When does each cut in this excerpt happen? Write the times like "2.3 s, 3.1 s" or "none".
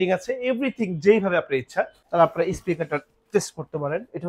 2.0 s